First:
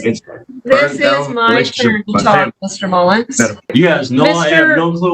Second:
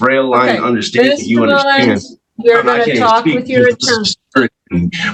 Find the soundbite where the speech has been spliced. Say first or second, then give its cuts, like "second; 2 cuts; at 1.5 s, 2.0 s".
first; 1 cut; at 3.7 s